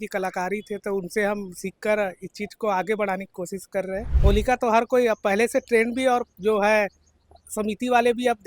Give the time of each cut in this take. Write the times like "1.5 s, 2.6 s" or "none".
4.1 s

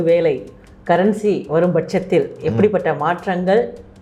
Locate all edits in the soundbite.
none

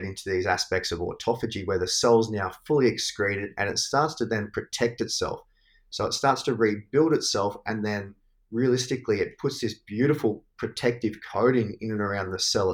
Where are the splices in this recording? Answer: none

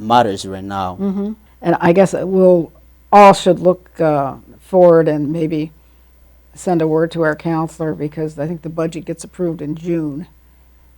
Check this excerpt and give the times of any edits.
1.5 s

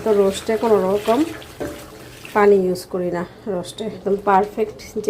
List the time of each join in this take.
3.9 s

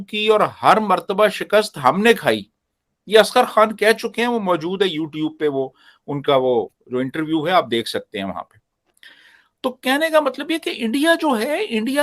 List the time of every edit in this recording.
none

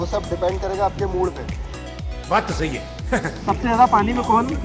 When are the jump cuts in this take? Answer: 3.3 s

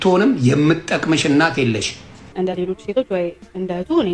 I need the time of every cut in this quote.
2.2 s

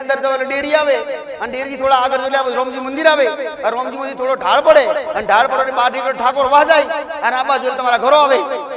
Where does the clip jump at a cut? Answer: none

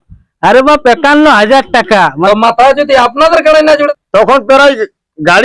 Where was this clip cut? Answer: 2.2 s, 3.9 s

